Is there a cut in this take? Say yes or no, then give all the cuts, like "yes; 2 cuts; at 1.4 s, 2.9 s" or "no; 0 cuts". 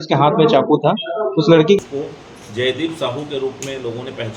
yes; 1 cut; at 1.8 s